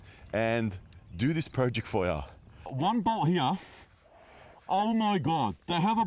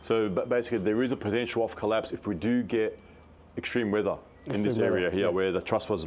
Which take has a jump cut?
first; 1 cut; at 2.7 s

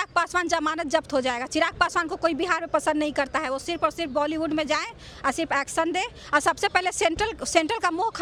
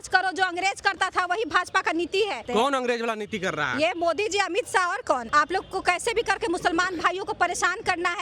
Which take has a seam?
second; 2 cuts; at 2.4 s, 5.2 s

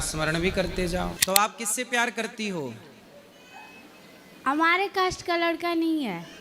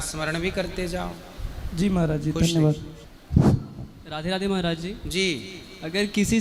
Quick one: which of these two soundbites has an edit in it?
first; 1 cut; at 1.2 s

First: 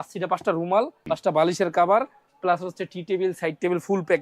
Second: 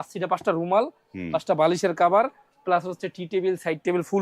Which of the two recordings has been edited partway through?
first; 1 cut; at 1.0 s

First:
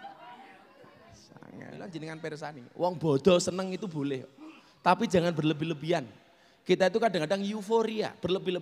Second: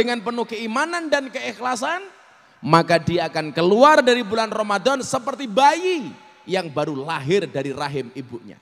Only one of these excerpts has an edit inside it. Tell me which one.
first; 1 cut; at 1.8 s

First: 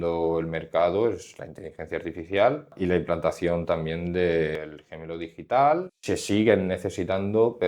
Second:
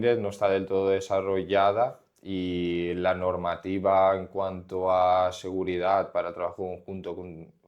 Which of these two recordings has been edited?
first; 3 cuts; at 2.7 s, 4.6 s, 5.9 s

